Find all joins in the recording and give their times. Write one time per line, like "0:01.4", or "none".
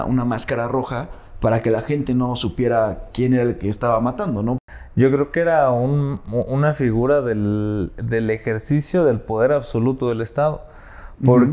0:04.7